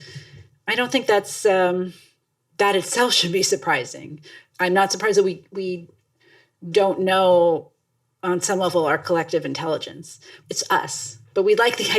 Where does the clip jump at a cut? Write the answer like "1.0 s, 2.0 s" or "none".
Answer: 10.3 s